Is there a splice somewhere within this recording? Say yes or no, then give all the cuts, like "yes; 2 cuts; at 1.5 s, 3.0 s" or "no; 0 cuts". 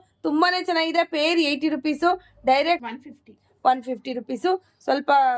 yes; 1 cut; at 2.8 s